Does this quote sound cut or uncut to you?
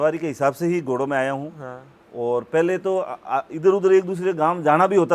uncut